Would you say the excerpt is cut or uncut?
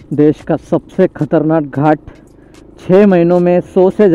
uncut